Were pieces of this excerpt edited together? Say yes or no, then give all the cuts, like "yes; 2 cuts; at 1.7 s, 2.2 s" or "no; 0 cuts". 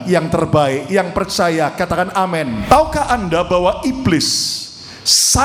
yes; 1 cut; at 2.6 s